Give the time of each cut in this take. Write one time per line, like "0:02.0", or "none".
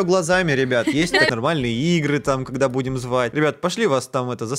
0:01.3